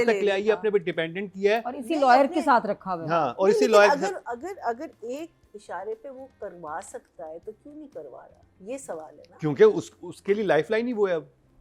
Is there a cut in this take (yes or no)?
no